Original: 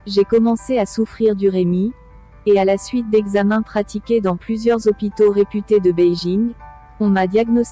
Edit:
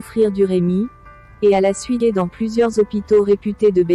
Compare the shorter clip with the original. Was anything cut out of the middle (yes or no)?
yes